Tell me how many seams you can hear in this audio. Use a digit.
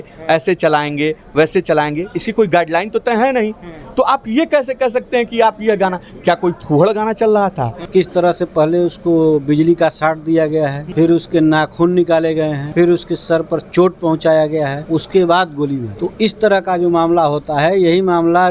5